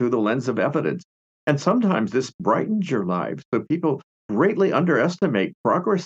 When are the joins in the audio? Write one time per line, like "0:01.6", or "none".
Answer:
0:04.1